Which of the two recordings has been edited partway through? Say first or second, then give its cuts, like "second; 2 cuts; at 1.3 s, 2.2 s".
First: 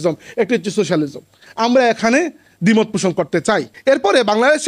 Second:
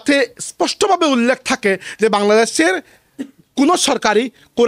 first; 1 cut; at 3.7 s